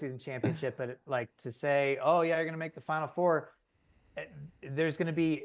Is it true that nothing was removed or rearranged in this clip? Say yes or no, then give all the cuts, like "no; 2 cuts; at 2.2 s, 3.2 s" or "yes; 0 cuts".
yes; 0 cuts